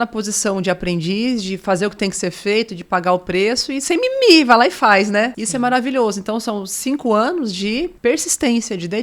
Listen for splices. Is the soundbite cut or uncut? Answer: cut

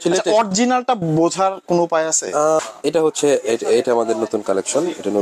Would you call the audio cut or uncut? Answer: cut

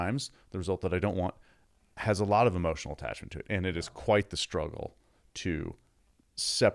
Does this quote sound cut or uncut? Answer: uncut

